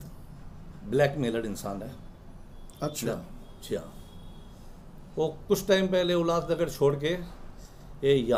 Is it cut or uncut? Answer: uncut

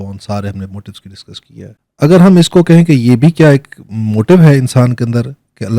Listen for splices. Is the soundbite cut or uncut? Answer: cut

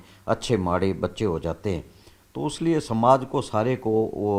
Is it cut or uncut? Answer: uncut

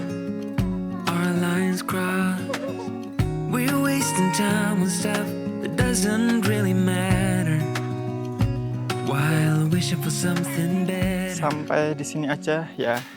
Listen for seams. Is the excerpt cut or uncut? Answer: cut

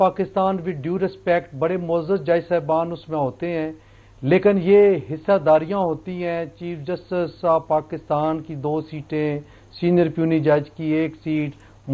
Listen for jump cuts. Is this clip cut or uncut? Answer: uncut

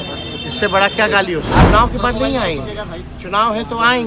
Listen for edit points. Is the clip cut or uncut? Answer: cut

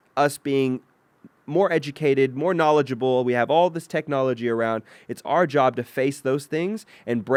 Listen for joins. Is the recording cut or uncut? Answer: uncut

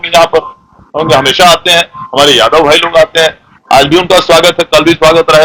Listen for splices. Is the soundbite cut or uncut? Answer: uncut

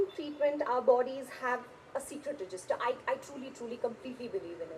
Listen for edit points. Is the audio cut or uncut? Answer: uncut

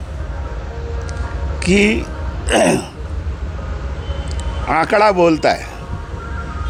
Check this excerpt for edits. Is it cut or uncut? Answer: uncut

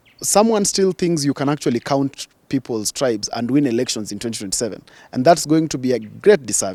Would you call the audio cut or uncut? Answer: uncut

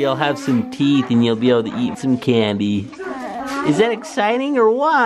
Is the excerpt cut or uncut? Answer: cut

